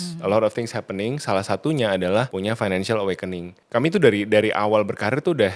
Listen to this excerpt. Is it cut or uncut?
cut